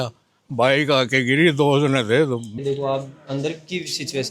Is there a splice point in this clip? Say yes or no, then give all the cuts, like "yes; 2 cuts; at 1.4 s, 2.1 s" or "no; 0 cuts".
yes; 1 cut; at 2.5 s